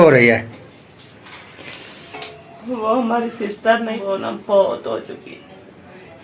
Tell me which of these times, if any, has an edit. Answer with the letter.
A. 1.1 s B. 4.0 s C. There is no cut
B